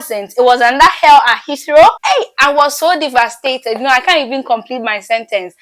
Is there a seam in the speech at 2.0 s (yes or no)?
yes